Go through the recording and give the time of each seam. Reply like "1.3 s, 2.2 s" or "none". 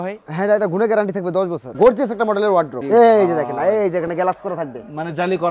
1.7 s, 2.8 s